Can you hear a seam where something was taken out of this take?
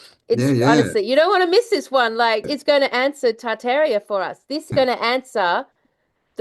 yes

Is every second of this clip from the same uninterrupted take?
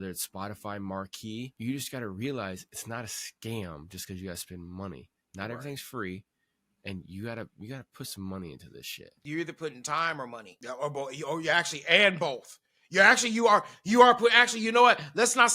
no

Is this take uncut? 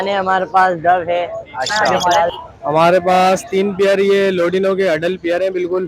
no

